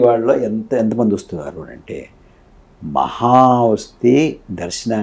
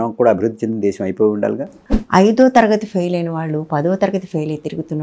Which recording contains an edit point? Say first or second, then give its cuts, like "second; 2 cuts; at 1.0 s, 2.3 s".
second; 1 cut; at 1.7 s